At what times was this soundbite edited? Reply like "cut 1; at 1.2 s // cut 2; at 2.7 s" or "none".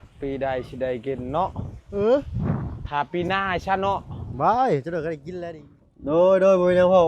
cut 1; at 5.3 s